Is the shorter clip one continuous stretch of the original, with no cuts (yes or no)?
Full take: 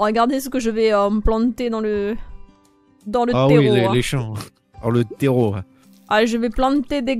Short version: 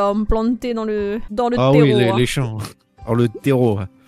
no